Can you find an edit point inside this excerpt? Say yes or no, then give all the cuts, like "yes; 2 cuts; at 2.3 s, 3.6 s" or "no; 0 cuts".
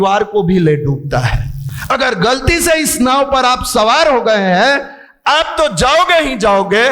no; 0 cuts